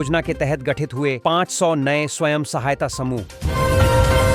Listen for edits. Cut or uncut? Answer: cut